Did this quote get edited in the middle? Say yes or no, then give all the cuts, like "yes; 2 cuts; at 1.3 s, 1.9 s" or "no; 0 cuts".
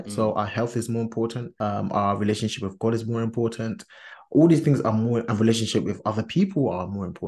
yes; 1 cut; at 1.5 s